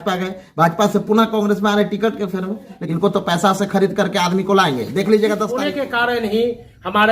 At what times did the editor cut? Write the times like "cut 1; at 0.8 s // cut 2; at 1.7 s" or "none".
cut 1; at 2.8 s // cut 2; at 5.6 s

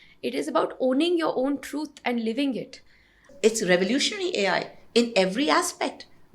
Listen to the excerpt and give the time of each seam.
cut 1; at 3.3 s

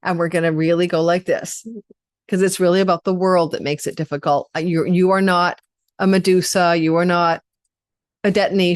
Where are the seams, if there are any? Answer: none

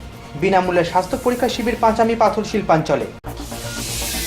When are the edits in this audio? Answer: none

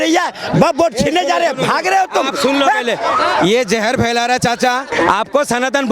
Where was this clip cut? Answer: cut 1; at 4.9 s

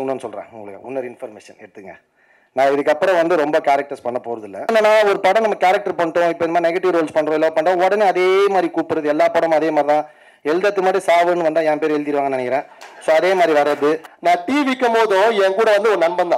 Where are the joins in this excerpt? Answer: cut 1; at 4.7 s // cut 2; at 14.1 s

